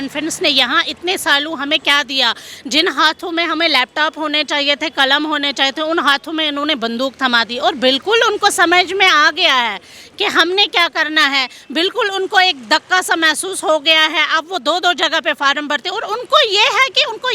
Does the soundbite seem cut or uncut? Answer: uncut